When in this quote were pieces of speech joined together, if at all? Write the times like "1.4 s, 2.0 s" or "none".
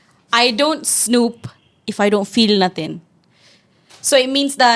none